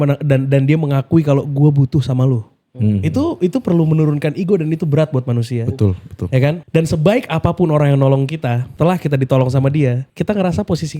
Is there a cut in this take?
yes; 2 cuts; at 8.7 s, 10.1 s

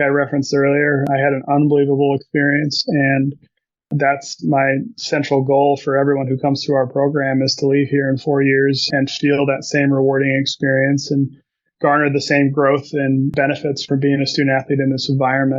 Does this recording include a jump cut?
yes; 4 cuts; at 1.0 s, 3.9 s, 8.9 s, 13.4 s

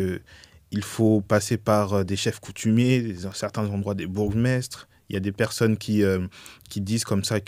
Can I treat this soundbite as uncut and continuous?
yes; 0 cuts

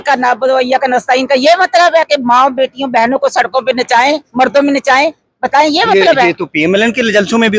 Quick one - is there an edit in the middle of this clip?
no; 0 cuts

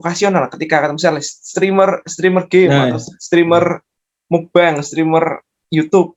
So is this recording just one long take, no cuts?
yes; 0 cuts

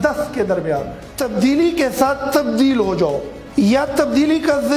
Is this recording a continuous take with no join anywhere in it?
no; 1 cut; at 1.0 s

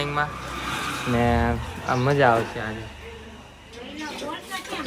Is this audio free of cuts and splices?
yes; 0 cuts

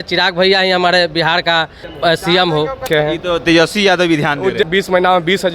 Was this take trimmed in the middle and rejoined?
yes; 3 cuts; at 1.8 s, 2.9 s, 4.7 s

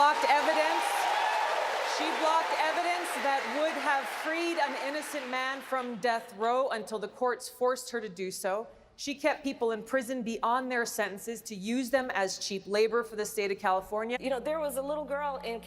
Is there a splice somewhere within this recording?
yes; 1 cut; at 14.1 s

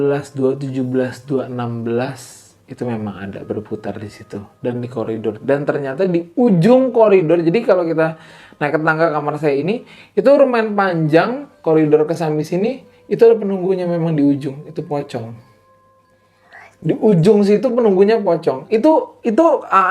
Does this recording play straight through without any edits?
yes; 0 cuts

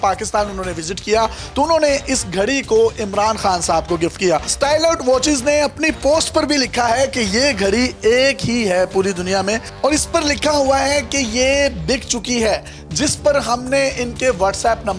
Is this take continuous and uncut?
yes; 0 cuts

